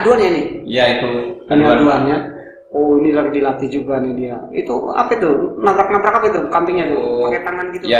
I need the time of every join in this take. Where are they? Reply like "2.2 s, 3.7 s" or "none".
6.4 s